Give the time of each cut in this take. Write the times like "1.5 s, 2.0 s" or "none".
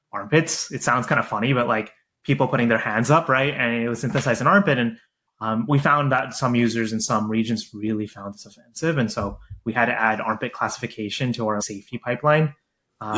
11.6 s